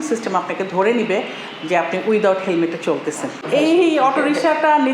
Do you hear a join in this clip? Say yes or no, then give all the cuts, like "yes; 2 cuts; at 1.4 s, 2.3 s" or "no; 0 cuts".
yes; 1 cut; at 3.4 s